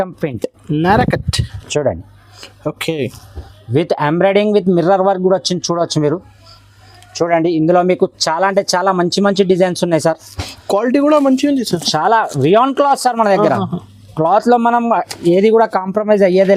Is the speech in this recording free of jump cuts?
yes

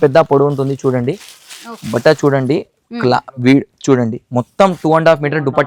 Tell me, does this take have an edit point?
no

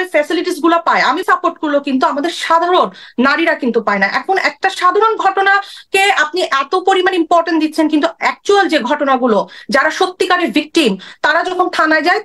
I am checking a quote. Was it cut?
yes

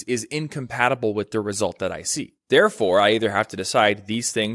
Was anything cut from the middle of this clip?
no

